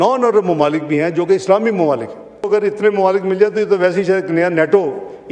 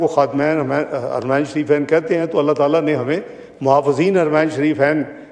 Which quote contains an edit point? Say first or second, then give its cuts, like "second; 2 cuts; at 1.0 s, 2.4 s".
first; 1 cut; at 2.5 s